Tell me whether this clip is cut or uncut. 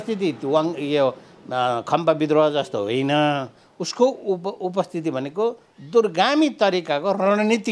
uncut